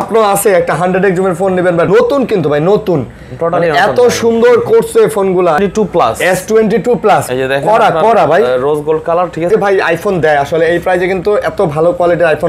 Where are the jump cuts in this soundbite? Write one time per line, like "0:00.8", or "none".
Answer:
0:01.9
0:05.6
0:09.5